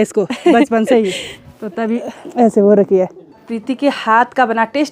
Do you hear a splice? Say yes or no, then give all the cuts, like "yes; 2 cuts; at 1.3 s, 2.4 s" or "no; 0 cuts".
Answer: yes; 1 cut; at 3.5 s